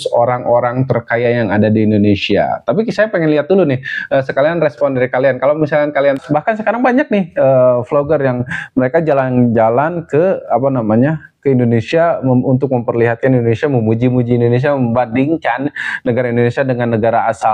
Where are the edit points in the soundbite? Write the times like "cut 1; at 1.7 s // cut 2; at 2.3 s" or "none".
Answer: cut 1; at 6.2 s